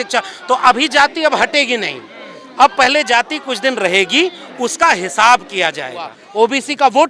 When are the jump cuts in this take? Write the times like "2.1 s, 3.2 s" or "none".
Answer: 6.2 s

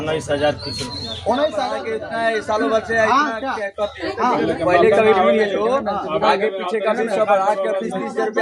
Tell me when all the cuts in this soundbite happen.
1.8 s

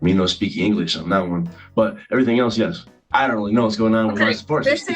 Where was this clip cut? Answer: 2.8 s

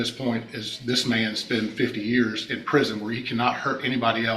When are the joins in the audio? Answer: none

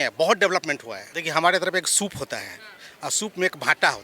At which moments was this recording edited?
1.1 s

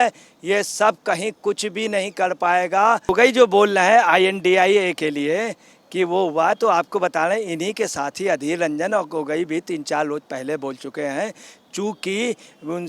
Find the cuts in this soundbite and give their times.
3.0 s

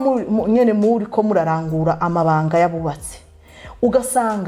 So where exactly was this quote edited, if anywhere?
none

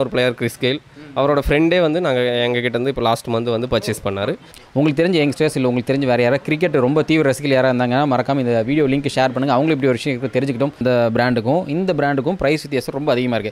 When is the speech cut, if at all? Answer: 4.5 s, 10.8 s

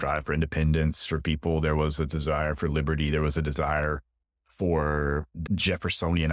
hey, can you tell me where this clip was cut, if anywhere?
5.3 s

